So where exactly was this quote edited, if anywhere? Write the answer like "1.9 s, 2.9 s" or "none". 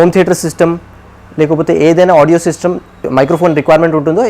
3.1 s